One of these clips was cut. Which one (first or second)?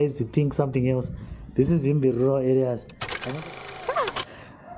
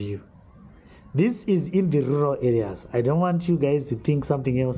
first